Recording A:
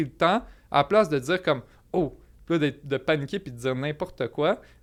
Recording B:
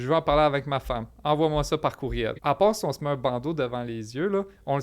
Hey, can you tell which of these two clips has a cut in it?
B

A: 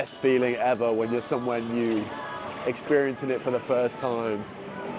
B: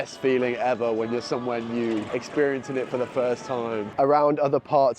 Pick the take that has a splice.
B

